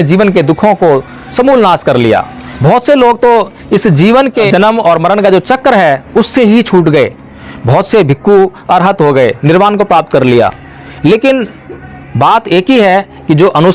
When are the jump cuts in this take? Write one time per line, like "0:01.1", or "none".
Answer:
0:04.5